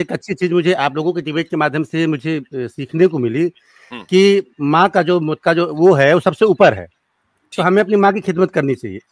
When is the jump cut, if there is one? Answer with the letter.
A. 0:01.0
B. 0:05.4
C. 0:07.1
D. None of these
B